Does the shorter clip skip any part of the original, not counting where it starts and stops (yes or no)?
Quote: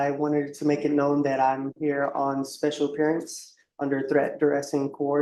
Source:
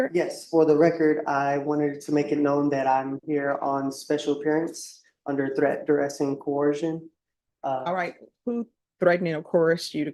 no